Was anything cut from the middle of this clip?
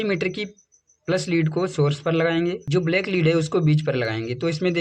yes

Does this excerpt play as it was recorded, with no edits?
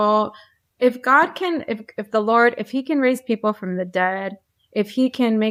yes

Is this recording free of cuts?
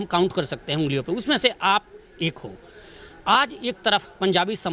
yes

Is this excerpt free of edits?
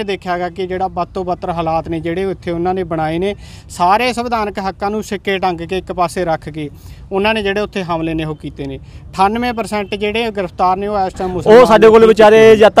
no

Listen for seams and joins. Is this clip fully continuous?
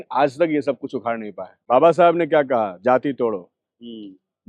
no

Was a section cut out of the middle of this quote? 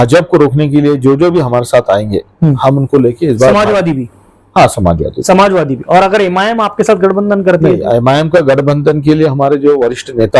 no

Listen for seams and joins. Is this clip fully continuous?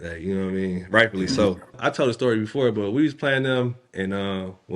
no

